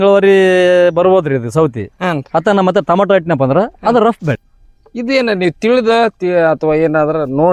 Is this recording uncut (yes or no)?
yes